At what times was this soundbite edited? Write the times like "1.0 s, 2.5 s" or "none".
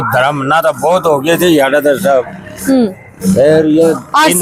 none